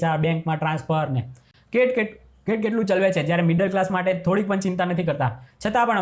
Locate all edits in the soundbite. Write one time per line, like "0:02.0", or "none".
none

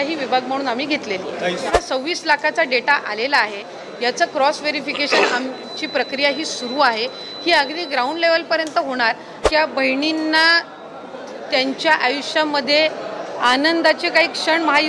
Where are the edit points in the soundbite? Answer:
0:01.7
0:09.4

